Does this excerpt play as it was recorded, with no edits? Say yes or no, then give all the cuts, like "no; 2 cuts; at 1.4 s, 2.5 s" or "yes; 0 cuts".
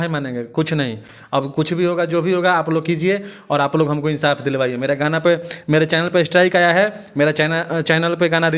yes; 0 cuts